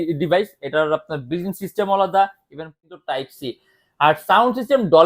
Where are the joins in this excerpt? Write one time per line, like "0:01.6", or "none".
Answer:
0:02.8